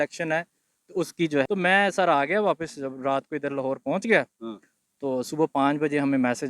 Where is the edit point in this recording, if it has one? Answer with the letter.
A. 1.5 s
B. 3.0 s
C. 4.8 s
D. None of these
A